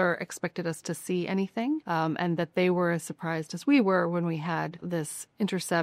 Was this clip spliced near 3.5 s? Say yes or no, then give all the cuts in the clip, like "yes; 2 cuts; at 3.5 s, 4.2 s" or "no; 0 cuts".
no; 2 cuts; at 1.8 s, 4.8 s